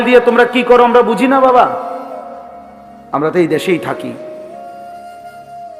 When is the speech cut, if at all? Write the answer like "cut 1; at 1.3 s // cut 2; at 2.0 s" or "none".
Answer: cut 1; at 4.8 s